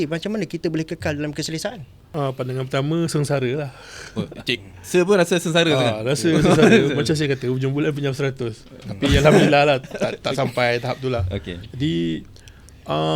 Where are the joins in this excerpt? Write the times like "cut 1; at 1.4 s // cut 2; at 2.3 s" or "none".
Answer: cut 1; at 1.9 s